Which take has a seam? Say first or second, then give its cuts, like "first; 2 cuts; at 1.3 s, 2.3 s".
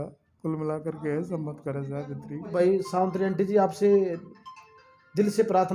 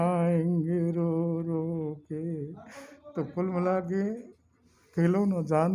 first; 1 cut; at 2.5 s